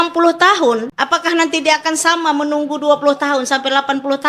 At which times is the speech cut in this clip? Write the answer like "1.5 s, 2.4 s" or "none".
0.9 s